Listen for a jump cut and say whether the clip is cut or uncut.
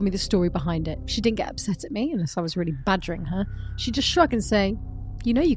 uncut